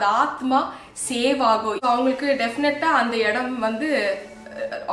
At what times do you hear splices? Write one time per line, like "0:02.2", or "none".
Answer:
0:01.8